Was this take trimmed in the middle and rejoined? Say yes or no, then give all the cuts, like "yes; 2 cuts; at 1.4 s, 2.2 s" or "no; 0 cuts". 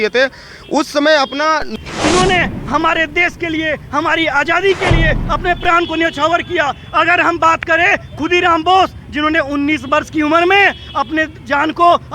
yes; 1 cut; at 1.7 s